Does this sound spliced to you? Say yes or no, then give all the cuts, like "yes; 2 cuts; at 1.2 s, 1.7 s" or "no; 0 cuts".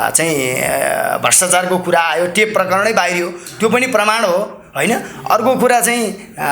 no; 0 cuts